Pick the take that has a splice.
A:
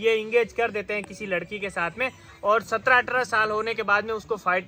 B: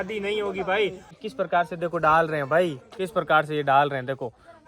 B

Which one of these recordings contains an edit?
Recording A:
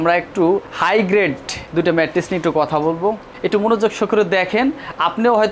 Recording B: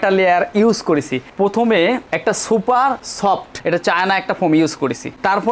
B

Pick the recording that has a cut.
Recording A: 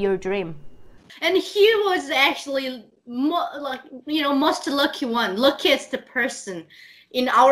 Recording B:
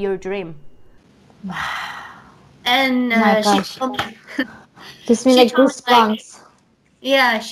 A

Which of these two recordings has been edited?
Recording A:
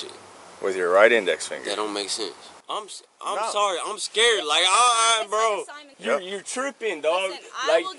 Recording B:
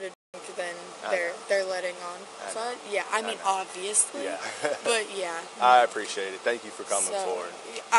A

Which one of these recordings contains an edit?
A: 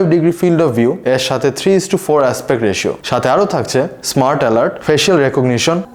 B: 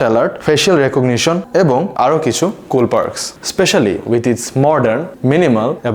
B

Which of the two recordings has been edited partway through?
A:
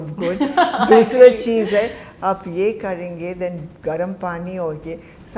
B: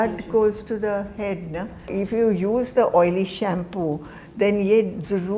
B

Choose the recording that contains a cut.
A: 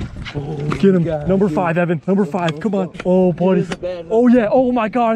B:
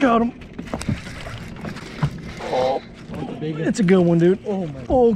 A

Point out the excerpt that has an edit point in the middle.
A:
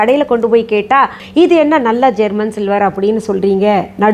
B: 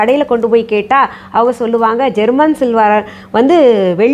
A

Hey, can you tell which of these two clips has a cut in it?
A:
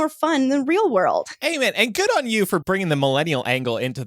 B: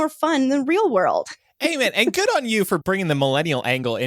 A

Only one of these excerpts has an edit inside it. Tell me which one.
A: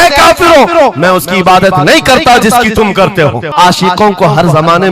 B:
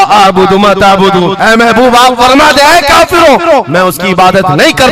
A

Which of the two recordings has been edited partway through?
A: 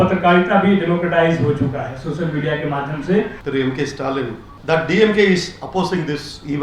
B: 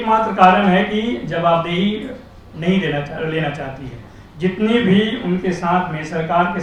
A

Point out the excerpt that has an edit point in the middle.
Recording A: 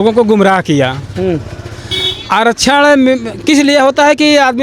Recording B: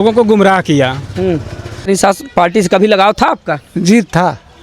B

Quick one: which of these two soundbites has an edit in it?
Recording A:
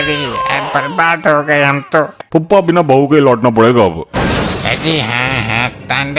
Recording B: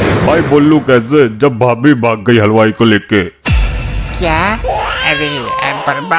A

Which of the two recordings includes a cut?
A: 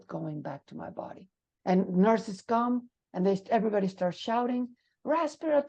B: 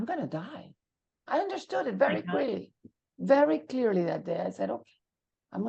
A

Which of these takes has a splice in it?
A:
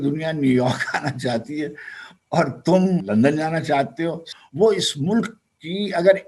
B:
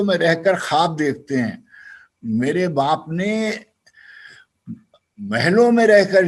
A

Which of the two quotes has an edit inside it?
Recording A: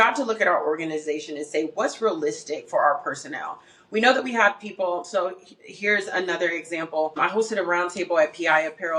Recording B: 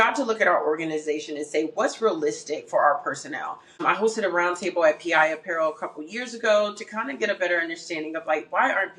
B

